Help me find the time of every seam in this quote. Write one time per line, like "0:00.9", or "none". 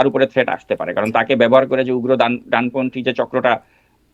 none